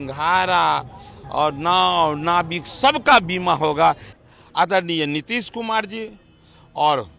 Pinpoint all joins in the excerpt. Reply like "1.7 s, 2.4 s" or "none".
4.1 s